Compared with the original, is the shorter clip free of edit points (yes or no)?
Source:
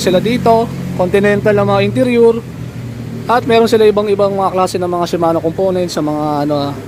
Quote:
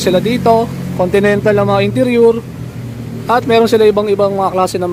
yes